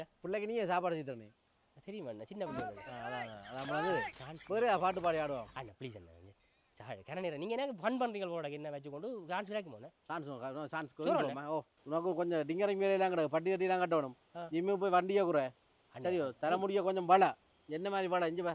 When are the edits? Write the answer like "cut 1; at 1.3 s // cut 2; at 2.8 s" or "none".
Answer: none